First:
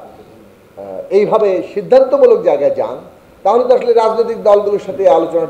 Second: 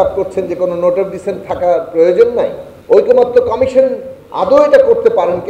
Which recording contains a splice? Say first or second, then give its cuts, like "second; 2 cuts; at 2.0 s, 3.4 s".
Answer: second; 1 cut; at 2.7 s